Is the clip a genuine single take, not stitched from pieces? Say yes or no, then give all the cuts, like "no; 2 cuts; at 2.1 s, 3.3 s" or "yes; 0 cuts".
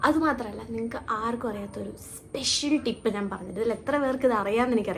yes; 0 cuts